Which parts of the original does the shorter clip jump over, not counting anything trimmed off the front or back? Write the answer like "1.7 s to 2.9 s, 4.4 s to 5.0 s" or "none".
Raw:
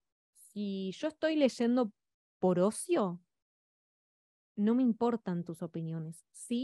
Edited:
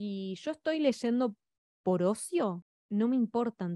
3.3 s to 4.4 s